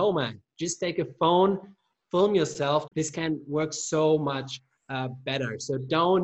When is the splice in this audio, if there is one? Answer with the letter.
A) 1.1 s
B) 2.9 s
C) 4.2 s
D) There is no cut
B